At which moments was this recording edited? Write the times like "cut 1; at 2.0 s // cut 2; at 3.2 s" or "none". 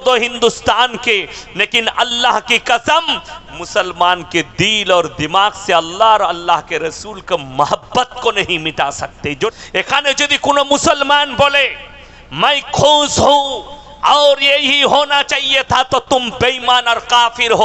cut 1; at 9.5 s

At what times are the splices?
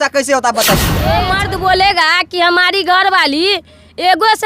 cut 1; at 1.2 s

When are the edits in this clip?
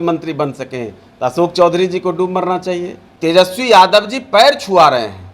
cut 1; at 3.1 s

